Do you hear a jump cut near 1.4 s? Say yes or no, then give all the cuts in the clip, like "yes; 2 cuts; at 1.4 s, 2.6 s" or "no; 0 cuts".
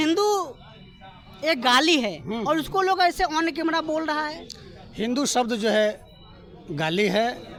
no; 0 cuts